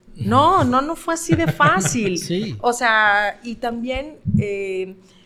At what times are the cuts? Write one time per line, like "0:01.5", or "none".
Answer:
none